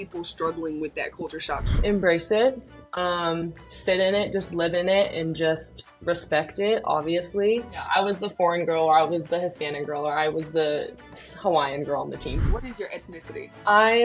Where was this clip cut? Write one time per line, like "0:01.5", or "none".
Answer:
0:01.7
0:07.9
0:12.4